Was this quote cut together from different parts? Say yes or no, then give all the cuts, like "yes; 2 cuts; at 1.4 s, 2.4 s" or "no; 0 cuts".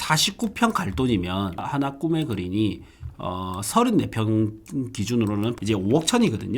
yes; 2 cuts; at 1.6 s, 5.6 s